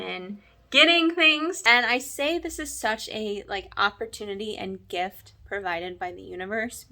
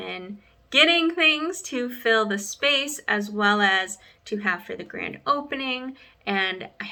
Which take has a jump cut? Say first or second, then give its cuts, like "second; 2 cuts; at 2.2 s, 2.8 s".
first; 1 cut; at 1.6 s